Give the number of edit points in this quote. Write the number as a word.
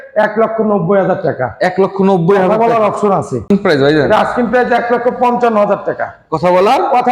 one